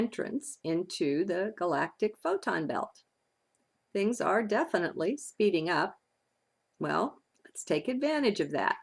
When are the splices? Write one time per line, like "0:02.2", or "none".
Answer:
0:07.1